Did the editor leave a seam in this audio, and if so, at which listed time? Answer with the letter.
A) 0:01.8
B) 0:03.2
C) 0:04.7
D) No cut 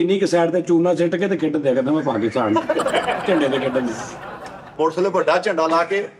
C